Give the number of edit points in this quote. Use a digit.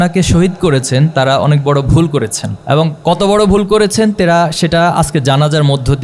1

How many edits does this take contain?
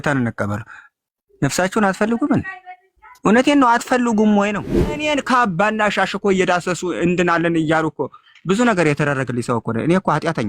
1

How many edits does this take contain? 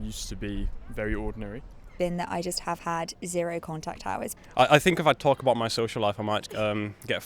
2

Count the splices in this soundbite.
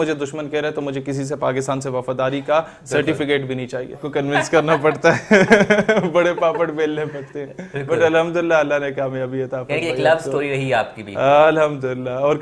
1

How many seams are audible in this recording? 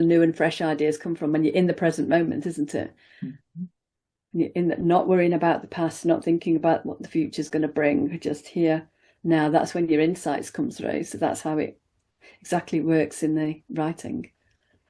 0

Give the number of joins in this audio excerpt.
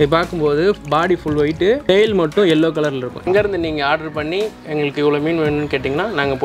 1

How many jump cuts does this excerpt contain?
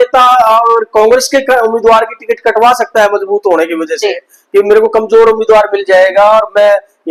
0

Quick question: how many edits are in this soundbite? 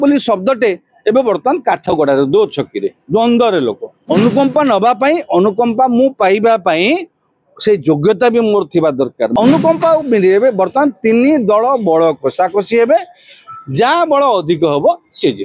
2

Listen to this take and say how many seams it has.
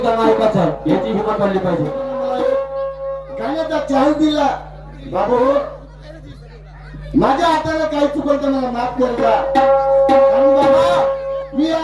1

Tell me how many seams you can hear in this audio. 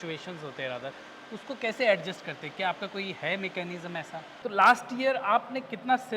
1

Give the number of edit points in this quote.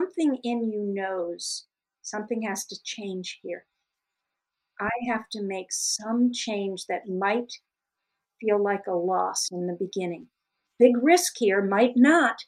1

